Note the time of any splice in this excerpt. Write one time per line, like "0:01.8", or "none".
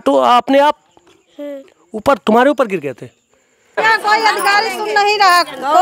0:03.8